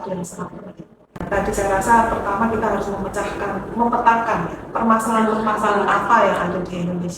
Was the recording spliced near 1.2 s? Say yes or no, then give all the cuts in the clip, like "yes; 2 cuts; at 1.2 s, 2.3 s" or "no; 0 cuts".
yes; 1 cut; at 1.2 s